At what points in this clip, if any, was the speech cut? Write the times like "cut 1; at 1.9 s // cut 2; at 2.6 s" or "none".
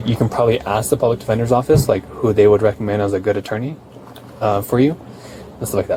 none